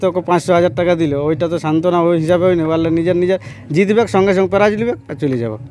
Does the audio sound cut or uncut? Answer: uncut